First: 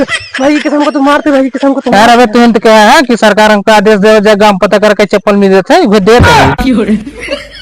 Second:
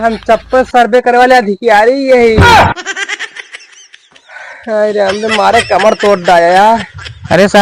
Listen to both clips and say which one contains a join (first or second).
first